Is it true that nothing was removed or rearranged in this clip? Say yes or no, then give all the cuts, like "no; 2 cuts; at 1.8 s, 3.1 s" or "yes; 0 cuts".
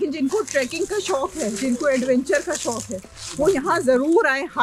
yes; 0 cuts